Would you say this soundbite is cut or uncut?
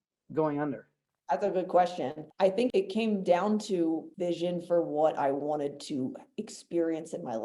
uncut